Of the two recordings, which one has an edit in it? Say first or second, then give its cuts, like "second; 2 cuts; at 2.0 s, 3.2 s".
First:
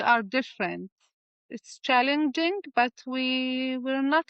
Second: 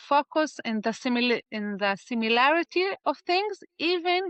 first; 1 cut; at 1.0 s